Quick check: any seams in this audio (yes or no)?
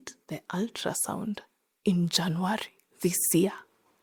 no